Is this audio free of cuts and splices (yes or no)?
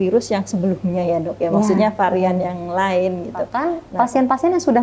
no